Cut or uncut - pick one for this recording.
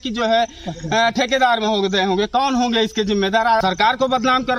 cut